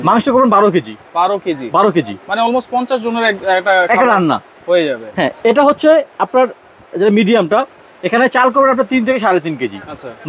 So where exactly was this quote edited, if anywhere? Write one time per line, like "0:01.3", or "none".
none